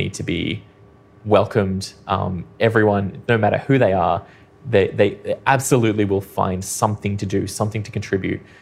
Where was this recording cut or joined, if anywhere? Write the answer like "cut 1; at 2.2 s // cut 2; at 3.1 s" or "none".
none